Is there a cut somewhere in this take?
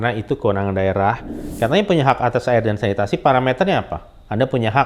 yes; 1 cut; at 1.4 s

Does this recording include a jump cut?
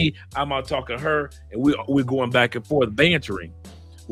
no; 0 cuts

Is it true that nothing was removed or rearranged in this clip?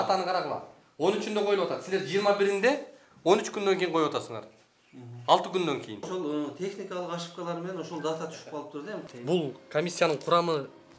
no; 2 cuts; at 6.1 s, 9.1 s

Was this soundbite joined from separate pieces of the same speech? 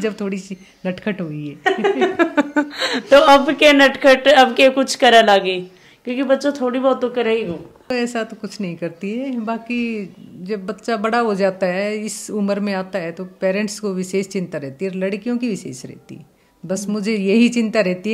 no; 0 cuts

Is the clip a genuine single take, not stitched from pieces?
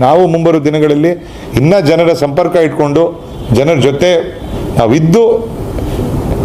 yes; 0 cuts

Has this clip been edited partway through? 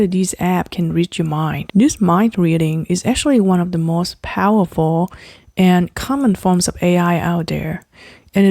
yes; 1 cut; at 1.6 s

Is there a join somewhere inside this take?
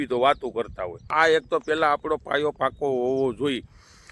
yes; 1 cut; at 1.1 s

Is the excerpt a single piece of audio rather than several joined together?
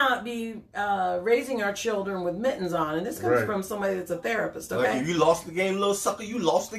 yes; 0 cuts

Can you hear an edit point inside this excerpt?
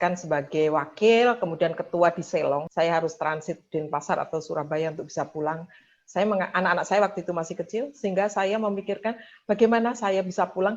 yes; 1 cut; at 2.7 s

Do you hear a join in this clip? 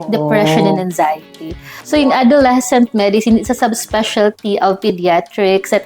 yes; 1 cut; at 1.8 s

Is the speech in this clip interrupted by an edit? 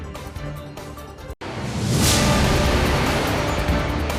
no; 0 cuts

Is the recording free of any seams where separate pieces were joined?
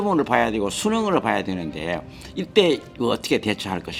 yes; 0 cuts

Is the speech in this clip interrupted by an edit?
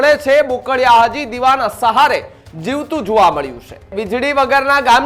yes; 1 cut; at 4.0 s

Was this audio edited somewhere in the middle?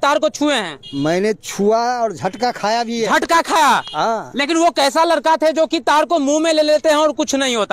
no; 0 cuts

